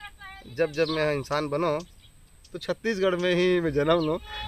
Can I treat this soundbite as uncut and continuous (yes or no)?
yes